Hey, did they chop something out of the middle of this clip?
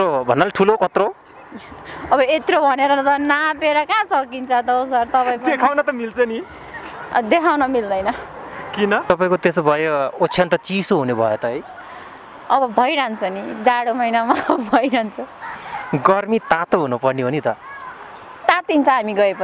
yes; 1 cut; at 9.0 s

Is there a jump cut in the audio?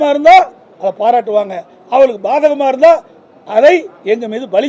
no; 0 cuts

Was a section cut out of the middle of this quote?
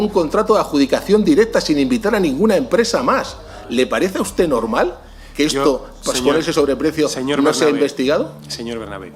no; 0 cuts

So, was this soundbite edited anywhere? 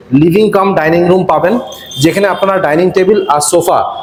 no; 0 cuts

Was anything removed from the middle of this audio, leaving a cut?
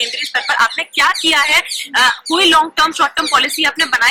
no; 0 cuts

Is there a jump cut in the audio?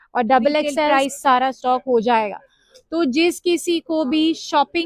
yes; 1 cut; at 0.9 s

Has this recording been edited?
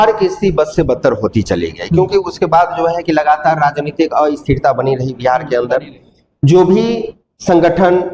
no; 0 cuts

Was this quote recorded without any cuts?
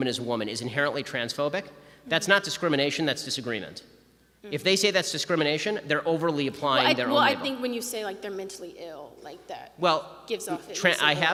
yes; 0 cuts

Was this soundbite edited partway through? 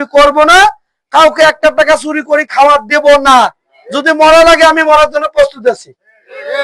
no; 0 cuts

